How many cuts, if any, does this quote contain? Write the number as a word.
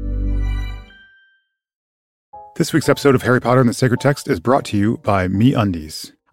one